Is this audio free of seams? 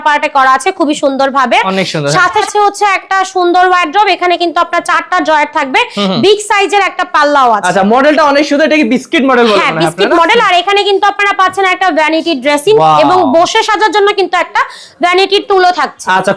yes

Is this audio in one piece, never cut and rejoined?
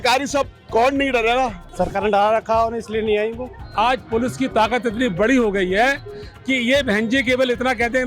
no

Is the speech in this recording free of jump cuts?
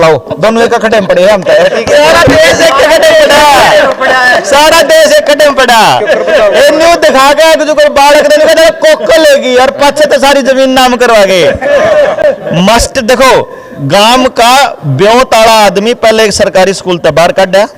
yes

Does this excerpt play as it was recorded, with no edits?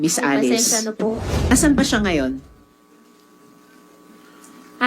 no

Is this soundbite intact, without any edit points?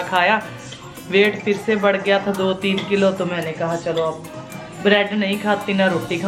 yes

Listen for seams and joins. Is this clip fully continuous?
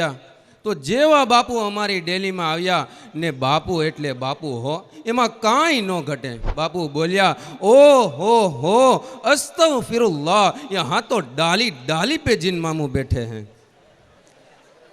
no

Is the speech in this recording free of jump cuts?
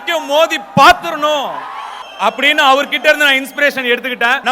yes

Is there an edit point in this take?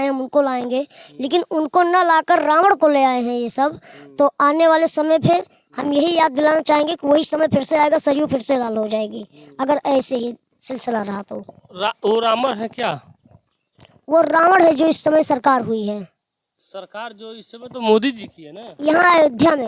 no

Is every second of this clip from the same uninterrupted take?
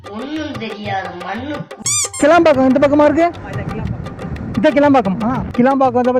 no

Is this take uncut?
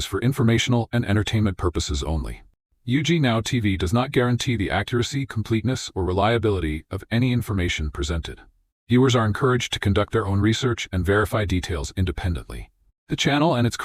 yes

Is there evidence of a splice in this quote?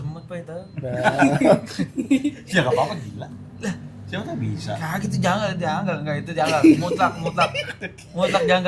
no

